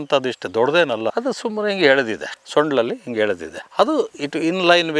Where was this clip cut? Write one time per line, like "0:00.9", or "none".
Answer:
0:01.1